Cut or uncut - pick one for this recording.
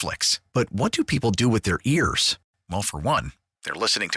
uncut